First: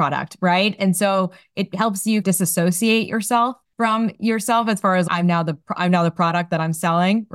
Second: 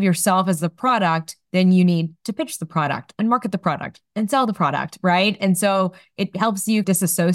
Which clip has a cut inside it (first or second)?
first